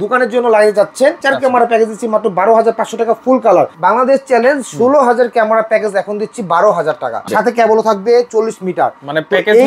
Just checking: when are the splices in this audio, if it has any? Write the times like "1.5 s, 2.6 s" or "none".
1.2 s, 3.7 s, 7.3 s